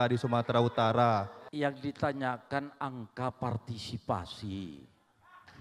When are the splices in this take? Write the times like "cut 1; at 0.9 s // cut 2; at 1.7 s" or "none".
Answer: cut 1; at 1.4 s